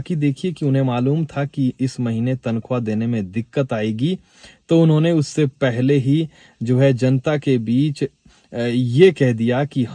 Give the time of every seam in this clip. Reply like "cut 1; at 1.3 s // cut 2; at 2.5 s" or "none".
none